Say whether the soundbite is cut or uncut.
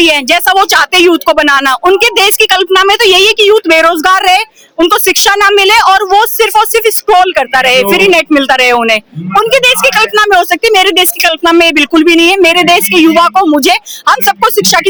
uncut